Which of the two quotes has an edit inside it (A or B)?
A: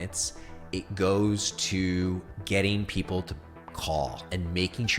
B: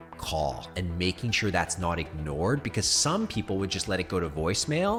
A